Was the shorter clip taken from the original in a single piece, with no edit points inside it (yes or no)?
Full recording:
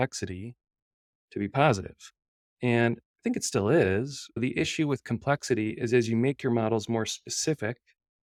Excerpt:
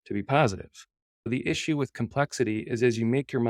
no